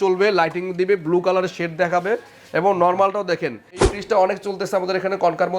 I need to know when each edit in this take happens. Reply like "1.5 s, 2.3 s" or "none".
3.8 s